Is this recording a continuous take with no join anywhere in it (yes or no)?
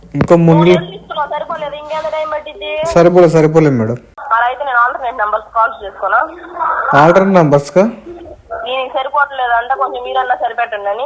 yes